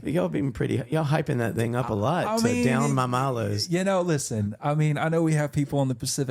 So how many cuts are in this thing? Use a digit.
0